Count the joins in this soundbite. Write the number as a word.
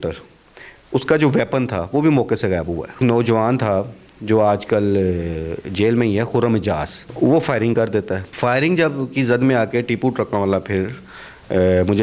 three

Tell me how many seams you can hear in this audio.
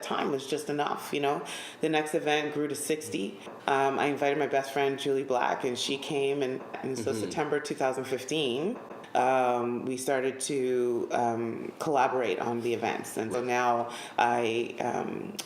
four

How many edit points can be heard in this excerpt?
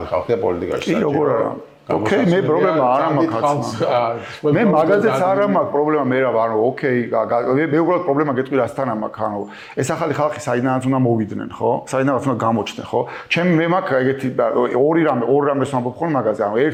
zero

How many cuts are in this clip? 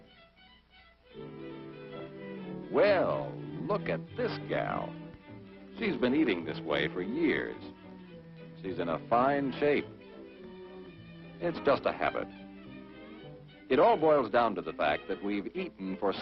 one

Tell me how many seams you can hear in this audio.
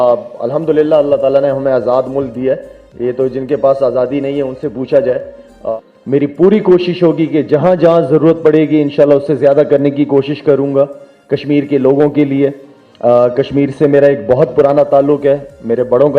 one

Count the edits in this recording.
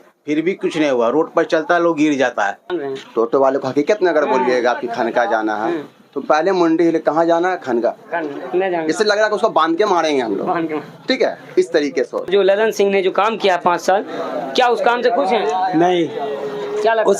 three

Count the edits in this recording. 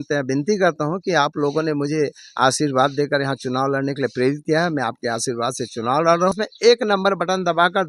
one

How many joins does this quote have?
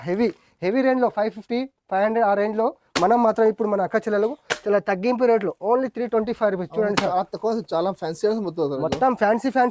zero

